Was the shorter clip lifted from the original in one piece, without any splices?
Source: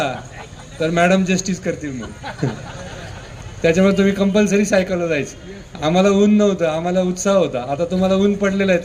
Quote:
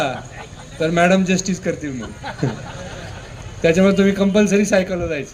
yes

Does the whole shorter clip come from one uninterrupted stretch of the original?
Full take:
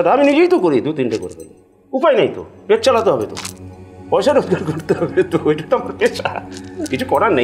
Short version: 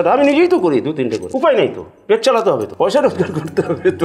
no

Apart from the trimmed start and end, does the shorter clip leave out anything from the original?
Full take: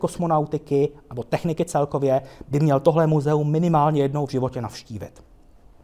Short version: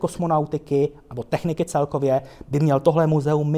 no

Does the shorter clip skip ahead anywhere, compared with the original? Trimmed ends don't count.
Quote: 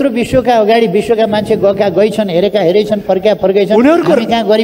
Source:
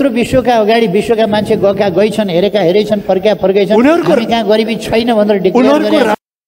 no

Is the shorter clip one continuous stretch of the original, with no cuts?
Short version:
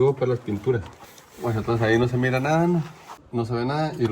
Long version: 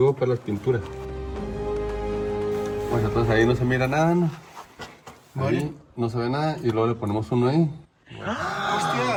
no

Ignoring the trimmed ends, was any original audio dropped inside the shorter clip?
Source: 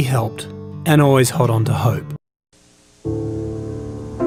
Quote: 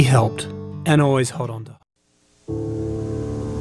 yes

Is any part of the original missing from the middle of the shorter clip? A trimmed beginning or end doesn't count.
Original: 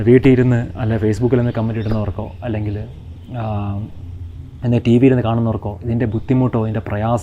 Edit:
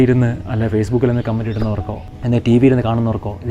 yes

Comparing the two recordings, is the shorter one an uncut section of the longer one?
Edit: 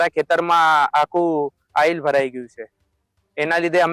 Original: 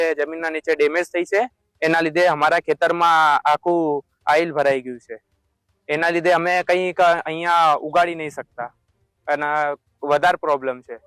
yes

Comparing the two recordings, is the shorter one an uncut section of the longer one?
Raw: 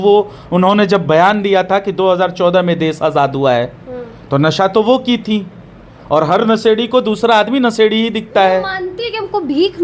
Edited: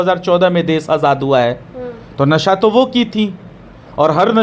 yes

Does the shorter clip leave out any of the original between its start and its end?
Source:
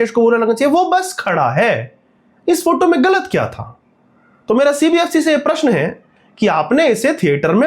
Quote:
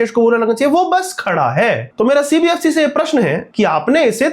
yes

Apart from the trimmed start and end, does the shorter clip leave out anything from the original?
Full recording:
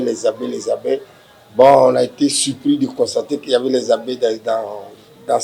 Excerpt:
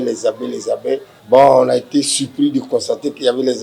yes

